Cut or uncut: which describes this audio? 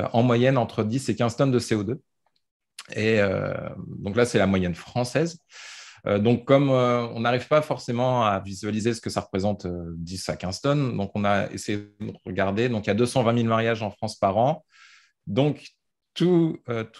cut